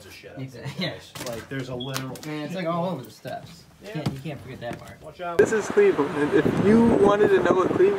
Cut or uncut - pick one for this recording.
cut